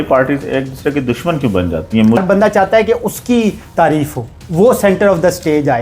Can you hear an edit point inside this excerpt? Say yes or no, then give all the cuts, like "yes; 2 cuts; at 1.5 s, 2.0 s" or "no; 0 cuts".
yes; 1 cut; at 2.2 s